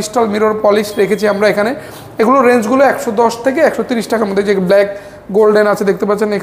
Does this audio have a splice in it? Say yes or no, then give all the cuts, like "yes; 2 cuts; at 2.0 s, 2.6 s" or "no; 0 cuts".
no; 0 cuts